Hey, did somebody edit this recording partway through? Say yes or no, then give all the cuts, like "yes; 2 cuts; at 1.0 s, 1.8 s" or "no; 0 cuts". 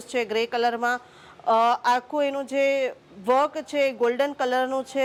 no; 0 cuts